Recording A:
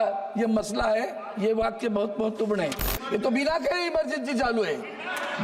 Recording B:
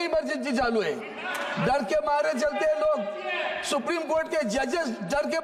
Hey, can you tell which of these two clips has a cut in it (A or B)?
A